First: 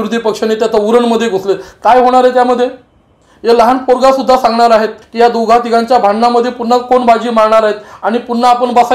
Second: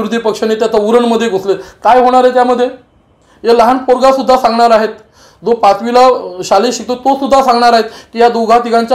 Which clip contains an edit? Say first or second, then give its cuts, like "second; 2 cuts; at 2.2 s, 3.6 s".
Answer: first; 1 cut; at 5.0 s